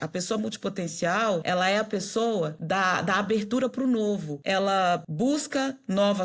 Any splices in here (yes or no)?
yes